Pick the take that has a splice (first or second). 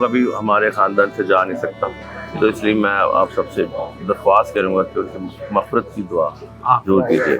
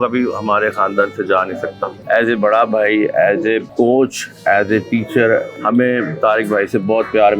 second